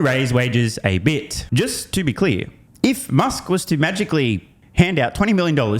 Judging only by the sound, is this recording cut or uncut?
cut